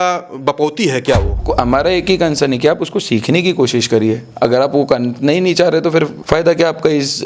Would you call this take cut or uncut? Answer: cut